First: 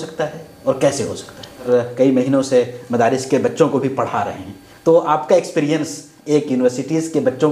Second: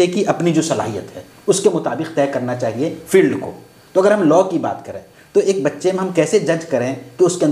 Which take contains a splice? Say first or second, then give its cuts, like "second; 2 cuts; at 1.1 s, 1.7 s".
first; 1 cut; at 1.7 s